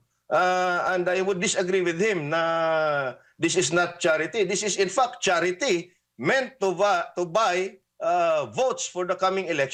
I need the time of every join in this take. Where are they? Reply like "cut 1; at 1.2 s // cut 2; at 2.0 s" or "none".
none